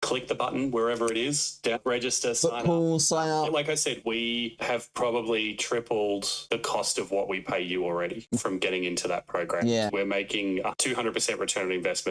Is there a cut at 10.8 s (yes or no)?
yes